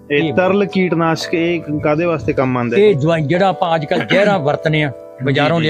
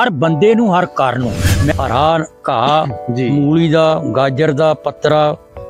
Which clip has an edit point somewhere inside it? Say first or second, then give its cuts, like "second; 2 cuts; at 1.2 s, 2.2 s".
second; 1 cut; at 1.7 s